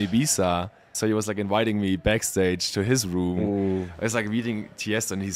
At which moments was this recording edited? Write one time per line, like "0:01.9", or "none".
0:01.0